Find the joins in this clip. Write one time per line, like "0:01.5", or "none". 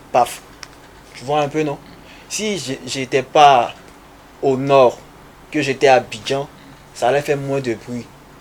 none